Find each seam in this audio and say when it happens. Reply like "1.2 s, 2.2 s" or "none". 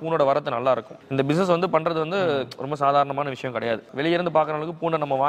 1.0 s